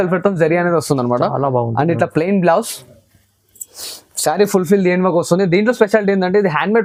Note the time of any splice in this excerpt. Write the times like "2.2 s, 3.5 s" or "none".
none